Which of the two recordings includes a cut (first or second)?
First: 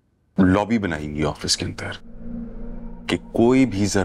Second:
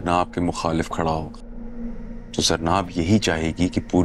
first